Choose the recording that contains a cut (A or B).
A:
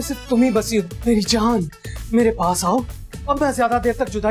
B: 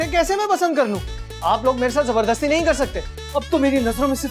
B